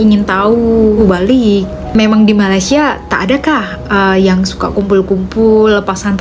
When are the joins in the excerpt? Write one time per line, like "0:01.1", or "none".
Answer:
0:01.0